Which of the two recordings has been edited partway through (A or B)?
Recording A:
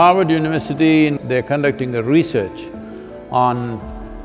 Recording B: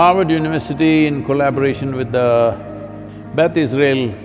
A